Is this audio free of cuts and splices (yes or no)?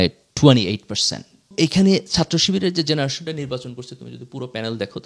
no